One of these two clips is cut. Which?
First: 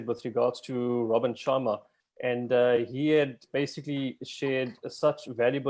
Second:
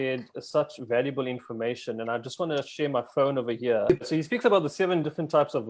second; 1 cut; at 4.1 s

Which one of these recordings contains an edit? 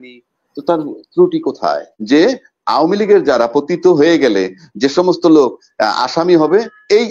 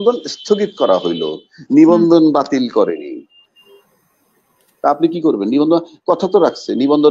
first; 1 cut; at 1.9 s

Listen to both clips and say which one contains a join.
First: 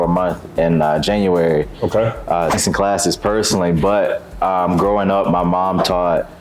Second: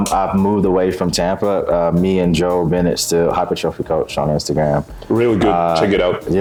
first; 1 cut; at 2.6 s

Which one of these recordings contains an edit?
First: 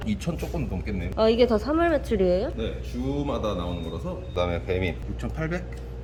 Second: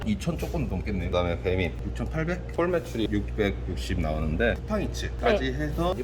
second; 3 cuts; at 1.0 s, 2.5 s, 4.6 s

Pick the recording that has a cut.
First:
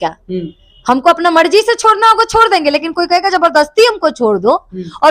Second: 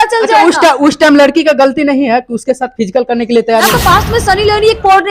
second; 1 cut; at 3.7 s

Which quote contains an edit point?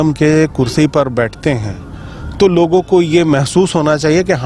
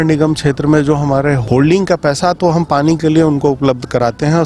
second; 1 cut; at 1.4 s

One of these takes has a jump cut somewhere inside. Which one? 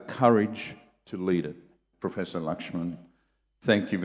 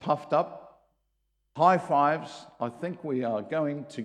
first; 1 cut; at 1.9 s

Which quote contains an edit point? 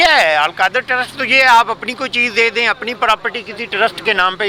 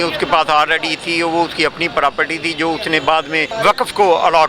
second; 1 cut; at 3.5 s

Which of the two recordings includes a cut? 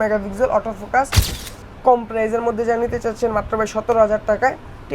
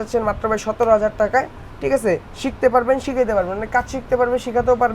first; 1 cut; at 1.3 s

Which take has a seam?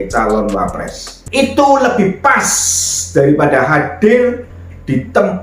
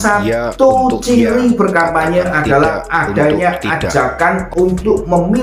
first; 1 cut; at 1.2 s

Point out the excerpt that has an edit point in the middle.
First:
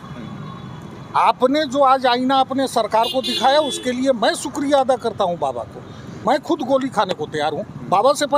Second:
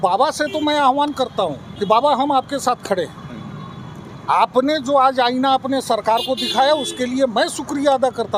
first; 1 cut; at 6.2 s

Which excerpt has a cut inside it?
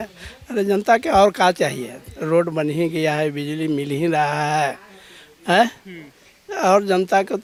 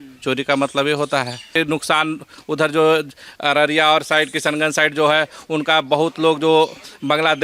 second; 1 cut; at 1.5 s

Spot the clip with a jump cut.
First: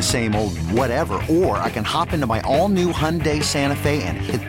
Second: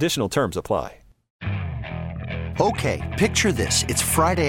second; 1 cut; at 1.3 s

